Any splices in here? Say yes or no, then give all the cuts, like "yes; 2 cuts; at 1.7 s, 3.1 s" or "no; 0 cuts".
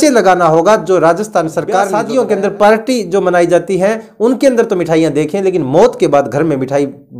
yes; 1 cut; at 1.9 s